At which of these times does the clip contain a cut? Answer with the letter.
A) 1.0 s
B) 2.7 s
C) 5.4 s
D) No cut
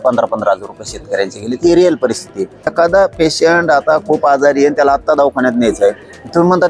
B